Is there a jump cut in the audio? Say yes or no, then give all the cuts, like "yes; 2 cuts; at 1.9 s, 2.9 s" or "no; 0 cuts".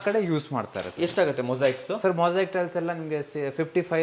no; 0 cuts